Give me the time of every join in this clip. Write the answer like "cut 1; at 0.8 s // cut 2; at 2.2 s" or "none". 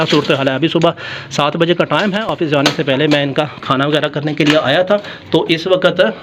none